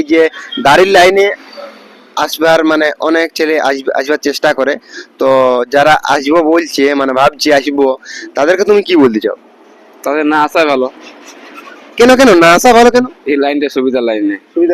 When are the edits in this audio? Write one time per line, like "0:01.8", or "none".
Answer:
none